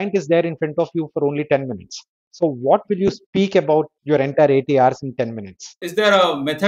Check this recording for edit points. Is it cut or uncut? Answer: cut